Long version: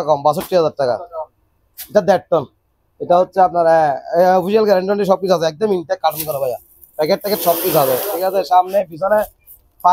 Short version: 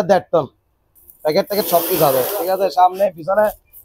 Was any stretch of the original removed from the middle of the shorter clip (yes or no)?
yes